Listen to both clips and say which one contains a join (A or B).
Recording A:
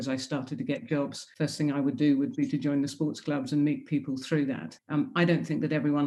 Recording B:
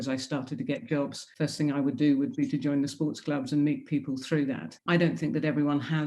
B